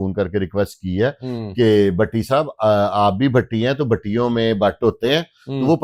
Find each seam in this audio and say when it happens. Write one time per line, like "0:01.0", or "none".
none